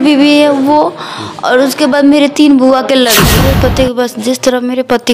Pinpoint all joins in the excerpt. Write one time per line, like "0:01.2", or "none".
0:03.4

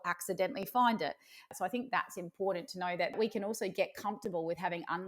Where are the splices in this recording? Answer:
0:01.5
0:03.1

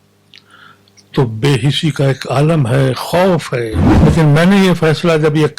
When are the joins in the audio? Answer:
0:03.8

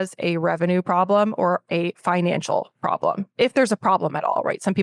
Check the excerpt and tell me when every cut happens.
none

